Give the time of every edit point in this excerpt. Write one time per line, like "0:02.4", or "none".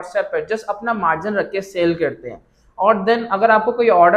none